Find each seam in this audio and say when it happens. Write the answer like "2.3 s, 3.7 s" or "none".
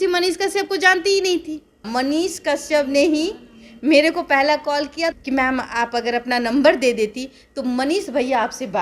1.9 s, 5.2 s

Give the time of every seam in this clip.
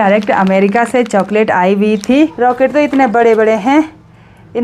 2.3 s

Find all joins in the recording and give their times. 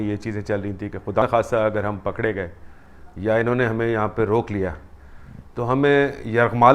1.2 s

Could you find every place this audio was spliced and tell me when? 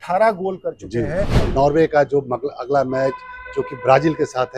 1.4 s

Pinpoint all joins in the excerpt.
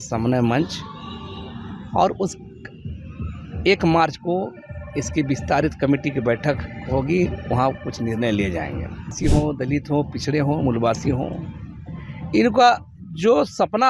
9.2 s

